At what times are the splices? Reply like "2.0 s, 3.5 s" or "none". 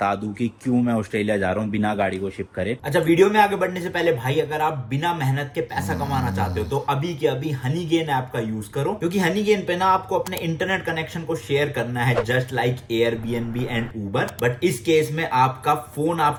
none